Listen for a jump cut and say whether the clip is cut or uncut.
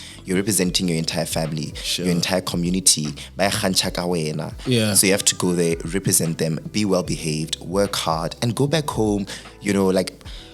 uncut